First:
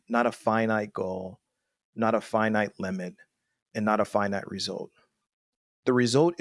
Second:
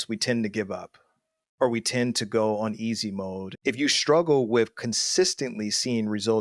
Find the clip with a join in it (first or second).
second